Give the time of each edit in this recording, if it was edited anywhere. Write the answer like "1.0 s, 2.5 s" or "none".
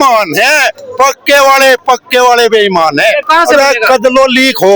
3.2 s